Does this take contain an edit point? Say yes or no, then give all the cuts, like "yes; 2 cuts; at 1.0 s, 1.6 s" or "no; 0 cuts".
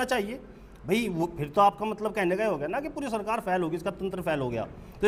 no; 0 cuts